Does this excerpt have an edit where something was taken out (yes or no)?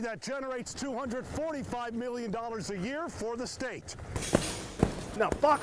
yes